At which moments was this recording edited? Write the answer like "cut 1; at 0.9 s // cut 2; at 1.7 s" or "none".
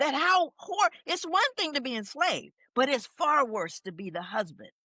none